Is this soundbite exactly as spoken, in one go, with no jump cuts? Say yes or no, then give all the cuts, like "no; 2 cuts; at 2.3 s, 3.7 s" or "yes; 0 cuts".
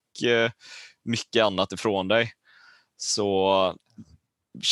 yes; 0 cuts